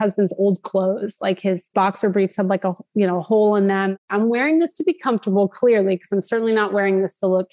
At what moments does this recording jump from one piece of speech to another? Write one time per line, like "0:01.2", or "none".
0:04.0